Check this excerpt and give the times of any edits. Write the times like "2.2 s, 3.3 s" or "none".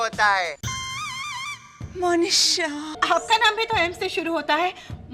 2.9 s